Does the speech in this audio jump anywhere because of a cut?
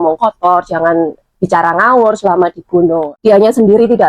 yes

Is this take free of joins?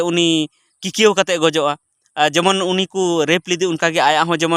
yes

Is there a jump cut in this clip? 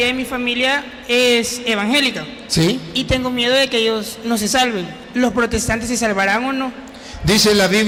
no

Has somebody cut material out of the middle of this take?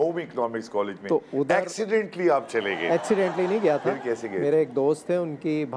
no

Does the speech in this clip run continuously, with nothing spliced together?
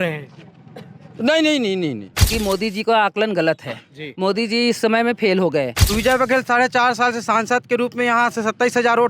no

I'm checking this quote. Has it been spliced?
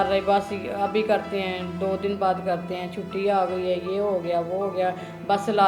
no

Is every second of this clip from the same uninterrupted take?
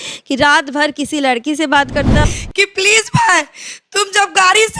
no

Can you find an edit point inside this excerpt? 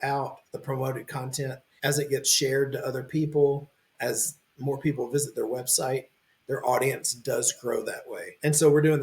yes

